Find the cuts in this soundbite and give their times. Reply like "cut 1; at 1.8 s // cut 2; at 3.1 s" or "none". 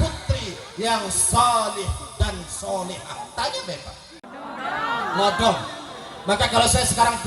cut 1; at 4.3 s